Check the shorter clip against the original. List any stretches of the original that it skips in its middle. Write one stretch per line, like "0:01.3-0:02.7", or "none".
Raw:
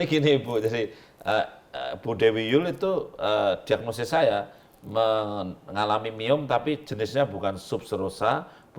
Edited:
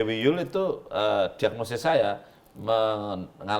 none